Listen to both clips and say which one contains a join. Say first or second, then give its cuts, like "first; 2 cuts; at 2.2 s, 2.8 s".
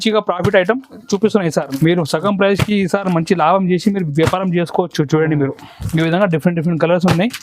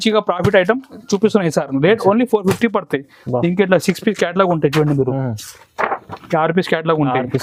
first; 1 cut; at 1.7 s